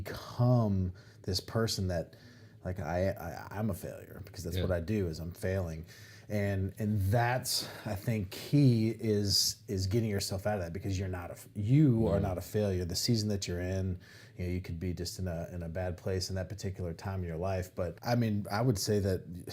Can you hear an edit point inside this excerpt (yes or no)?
yes